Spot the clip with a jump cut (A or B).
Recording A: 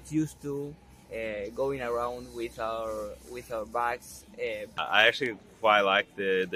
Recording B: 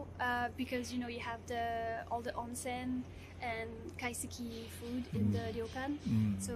A